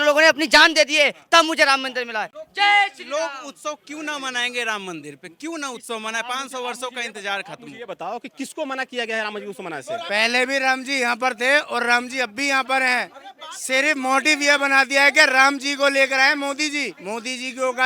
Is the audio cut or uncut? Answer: uncut